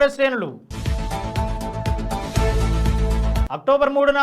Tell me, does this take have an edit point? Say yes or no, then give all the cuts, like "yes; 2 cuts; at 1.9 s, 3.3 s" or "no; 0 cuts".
no; 0 cuts